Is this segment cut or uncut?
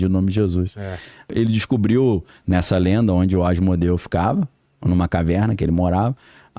cut